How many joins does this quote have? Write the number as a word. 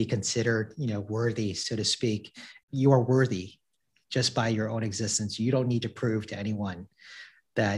one